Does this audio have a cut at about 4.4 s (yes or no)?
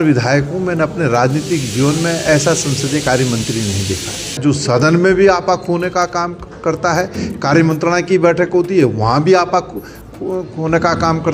yes